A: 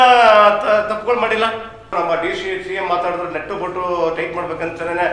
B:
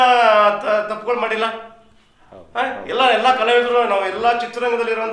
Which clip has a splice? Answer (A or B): A